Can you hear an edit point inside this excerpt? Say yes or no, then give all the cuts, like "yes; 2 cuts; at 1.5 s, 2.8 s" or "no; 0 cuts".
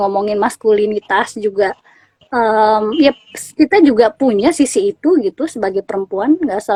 no; 0 cuts